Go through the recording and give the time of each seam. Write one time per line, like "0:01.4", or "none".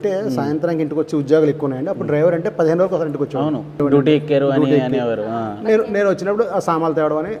0:03.8